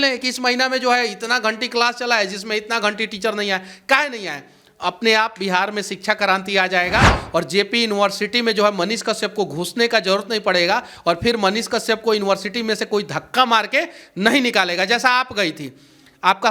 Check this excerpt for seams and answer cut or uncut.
uncut